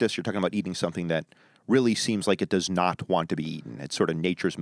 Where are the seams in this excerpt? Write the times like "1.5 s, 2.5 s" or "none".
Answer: none